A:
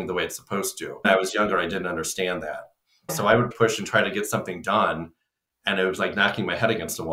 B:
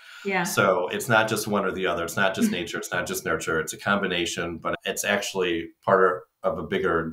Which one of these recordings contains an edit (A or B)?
A